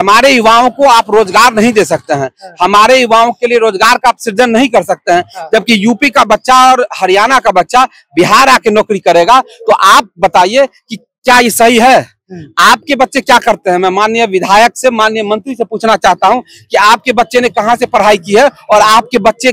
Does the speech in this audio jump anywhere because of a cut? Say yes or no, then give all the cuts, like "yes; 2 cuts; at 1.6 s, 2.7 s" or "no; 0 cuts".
no; 0 cuts